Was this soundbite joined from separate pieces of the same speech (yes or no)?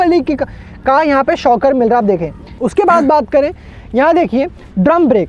no